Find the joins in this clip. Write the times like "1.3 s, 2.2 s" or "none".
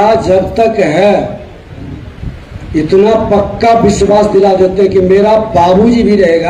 none